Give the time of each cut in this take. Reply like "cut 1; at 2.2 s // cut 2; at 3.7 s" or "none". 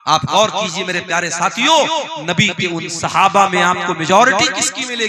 none